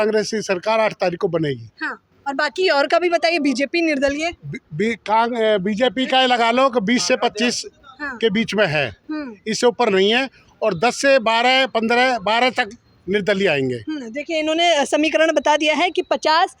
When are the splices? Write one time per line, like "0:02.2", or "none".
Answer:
none